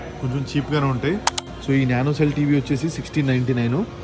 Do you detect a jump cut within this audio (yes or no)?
yes